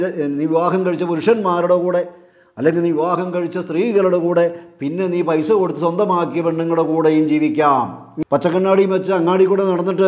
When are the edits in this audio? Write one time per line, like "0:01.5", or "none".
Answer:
0:08.0